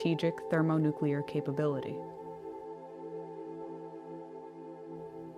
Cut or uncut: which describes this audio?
uncut